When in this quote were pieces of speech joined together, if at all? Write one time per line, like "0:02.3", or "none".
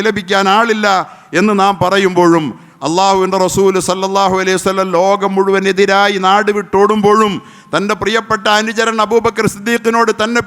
none